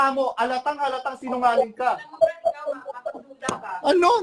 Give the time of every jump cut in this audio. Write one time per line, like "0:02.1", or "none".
none